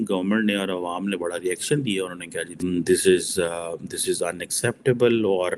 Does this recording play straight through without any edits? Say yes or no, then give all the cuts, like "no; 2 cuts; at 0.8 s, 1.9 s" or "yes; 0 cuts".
no; 1 cut; at 2.6 s